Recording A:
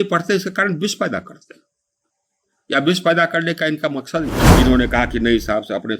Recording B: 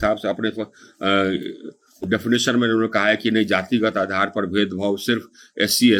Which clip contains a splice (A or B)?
A